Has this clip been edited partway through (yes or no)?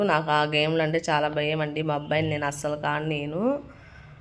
no